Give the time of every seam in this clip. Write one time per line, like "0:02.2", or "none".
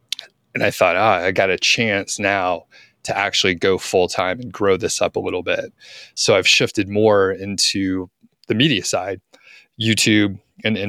0:06.1